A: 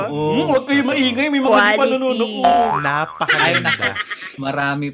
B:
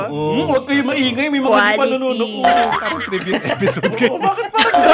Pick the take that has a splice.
B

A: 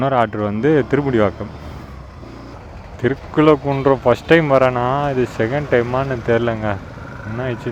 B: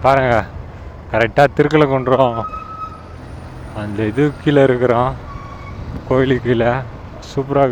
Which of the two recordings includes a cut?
A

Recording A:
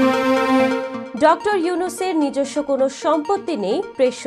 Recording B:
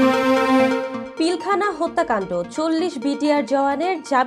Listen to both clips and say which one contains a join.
B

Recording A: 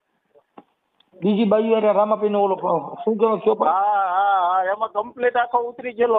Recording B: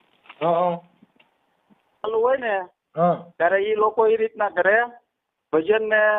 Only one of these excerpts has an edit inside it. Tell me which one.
B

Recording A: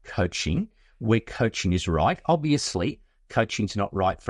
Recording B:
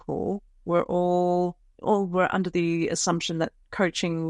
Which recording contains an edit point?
B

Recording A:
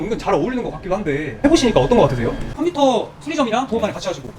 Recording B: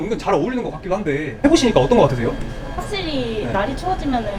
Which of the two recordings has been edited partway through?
A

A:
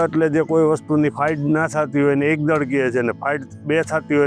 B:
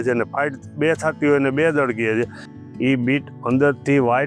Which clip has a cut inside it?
B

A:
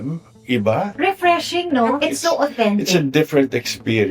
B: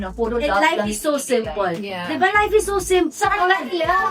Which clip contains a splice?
A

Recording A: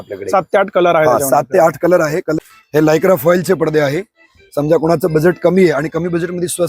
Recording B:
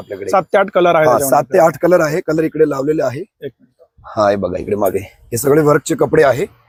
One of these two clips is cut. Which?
A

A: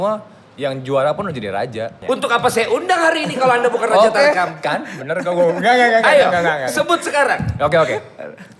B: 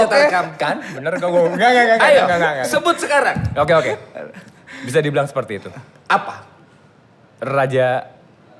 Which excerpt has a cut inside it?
A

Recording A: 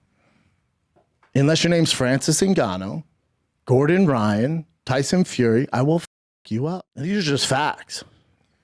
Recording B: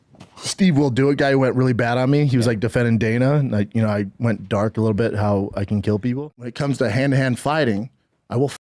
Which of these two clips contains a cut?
B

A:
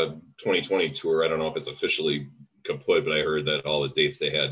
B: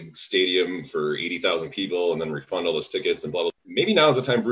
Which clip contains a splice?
B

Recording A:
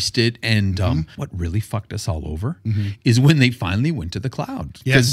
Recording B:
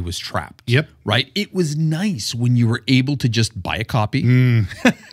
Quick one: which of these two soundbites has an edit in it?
A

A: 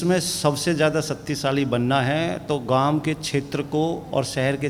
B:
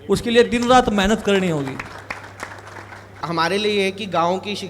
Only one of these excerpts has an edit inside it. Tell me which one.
B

